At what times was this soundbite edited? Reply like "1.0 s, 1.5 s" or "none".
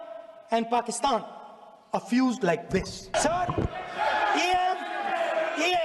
3.1 s

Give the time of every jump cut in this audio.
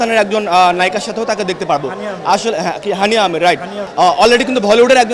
3.8 s

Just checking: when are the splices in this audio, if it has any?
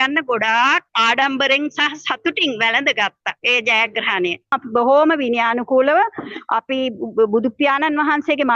0.9 s, 3.3 s, 4.6 s

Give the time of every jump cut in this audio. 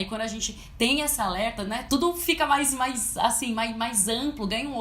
1.8 s

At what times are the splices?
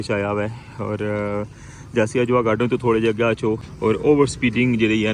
3.7 s

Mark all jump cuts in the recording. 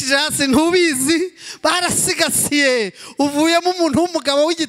none

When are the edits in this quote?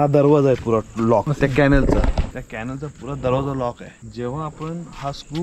none

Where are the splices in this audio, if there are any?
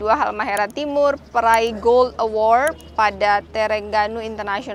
none

